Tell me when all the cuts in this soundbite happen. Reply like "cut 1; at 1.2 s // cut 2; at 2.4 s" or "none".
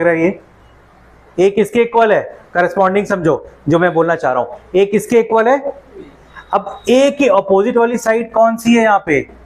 cut 1; at 1.2 s